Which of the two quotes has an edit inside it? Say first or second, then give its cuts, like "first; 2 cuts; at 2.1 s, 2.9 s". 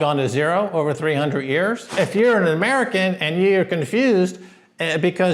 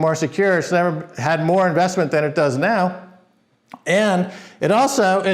first; 1 cut; at 1.9 s